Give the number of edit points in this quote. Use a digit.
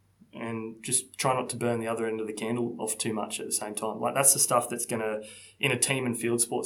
0